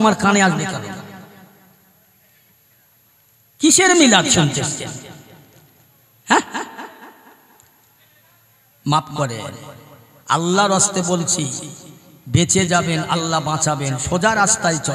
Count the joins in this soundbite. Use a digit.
0